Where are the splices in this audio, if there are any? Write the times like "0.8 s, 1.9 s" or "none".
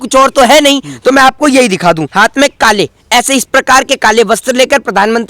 2.1 s

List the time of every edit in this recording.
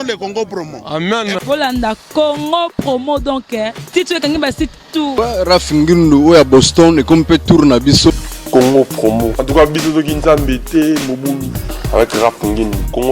5.1 s, 8.3 s

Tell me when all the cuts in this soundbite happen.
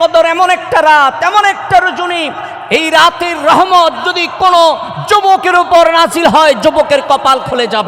none

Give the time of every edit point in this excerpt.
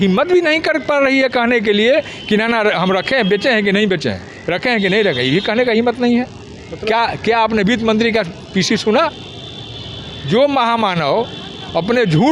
none

